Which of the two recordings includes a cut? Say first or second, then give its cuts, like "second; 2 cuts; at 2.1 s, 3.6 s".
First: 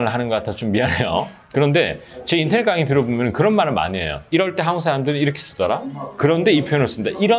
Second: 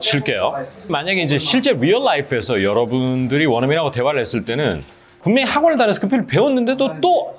second; 2 cuts; at 0.9 s, 5.1 s